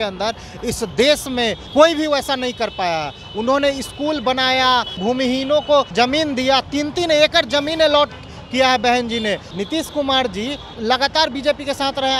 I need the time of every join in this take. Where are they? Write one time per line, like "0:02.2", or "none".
0:01.6
0:05.0
0:05.9
0:09.5
0:10.7